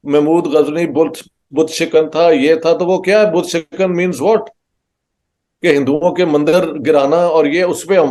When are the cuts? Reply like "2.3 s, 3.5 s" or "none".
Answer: none